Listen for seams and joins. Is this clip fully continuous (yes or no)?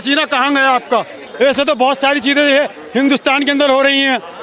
no